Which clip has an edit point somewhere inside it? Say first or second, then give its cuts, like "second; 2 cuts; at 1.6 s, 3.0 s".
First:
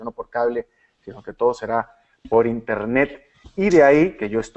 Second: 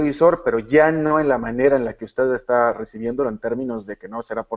second; 1 cut; at 3.3 s